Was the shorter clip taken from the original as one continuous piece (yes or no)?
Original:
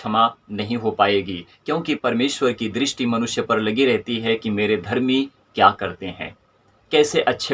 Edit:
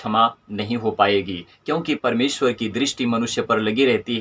yes